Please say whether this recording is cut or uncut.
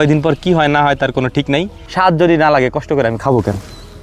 cut